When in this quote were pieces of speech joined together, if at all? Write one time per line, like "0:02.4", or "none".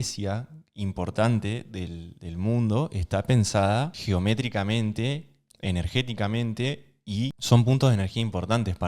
none